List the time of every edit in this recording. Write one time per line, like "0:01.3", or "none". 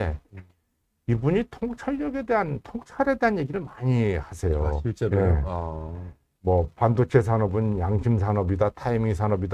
none